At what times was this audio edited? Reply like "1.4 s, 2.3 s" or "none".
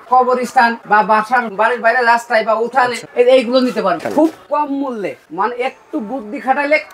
3.0 s, 4.0 s, 5.2 s